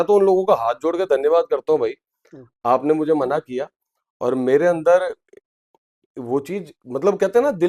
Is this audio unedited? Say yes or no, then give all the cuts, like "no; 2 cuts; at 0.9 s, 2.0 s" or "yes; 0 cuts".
yes; 0 cuts